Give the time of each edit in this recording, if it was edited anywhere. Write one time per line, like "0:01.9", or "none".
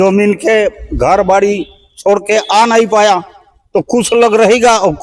none